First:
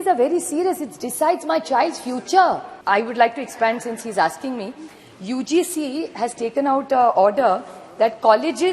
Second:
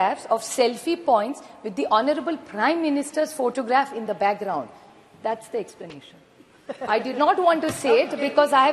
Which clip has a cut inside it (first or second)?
first